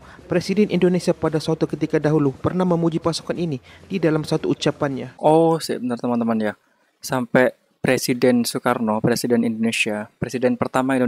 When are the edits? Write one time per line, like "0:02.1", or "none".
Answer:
0:05.1